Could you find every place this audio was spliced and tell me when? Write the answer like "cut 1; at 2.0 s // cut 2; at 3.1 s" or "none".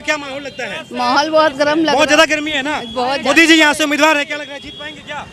none